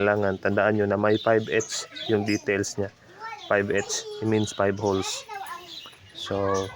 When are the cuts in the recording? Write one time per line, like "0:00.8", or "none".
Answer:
none